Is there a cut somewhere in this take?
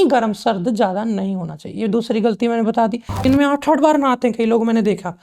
yes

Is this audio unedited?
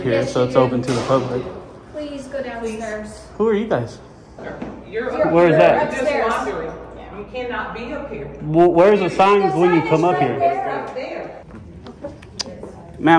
no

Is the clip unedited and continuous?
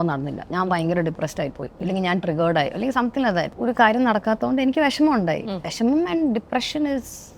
no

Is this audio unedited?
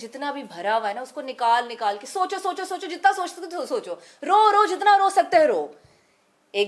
yes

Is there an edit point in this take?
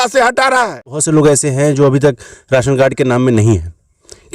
yes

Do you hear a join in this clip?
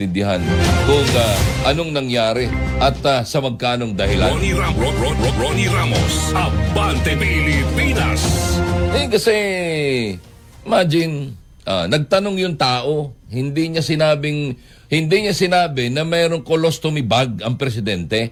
no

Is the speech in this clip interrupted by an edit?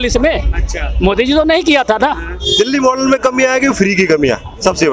yes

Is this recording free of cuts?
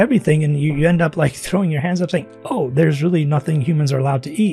yes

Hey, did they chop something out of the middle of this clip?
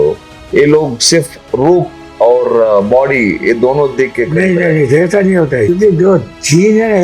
yes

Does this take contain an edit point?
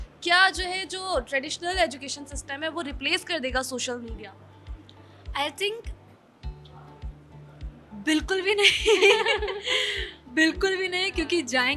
no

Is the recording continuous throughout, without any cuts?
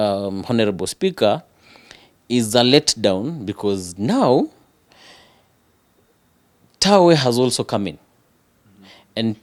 yes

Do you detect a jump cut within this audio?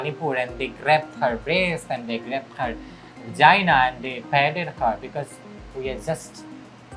no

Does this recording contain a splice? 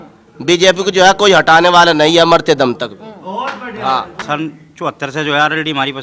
yes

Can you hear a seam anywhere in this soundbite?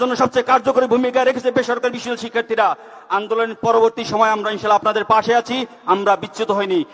no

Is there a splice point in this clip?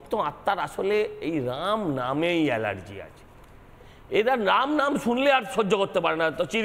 no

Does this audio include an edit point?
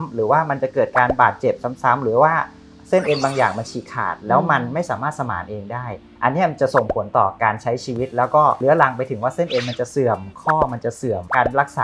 no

